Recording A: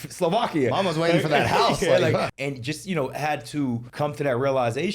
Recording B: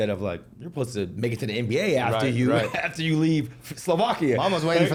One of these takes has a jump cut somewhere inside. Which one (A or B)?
A